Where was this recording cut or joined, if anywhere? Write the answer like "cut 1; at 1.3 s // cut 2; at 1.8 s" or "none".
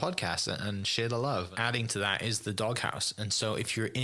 cut 1; at 1.5 s